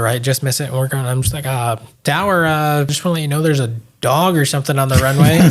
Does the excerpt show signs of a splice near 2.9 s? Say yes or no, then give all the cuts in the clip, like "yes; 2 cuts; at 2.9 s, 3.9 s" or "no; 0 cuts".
yes; 2 cuts; at 1.9 s, 2.9 s